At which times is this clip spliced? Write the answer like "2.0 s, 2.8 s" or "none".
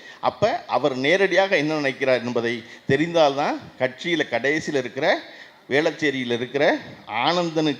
none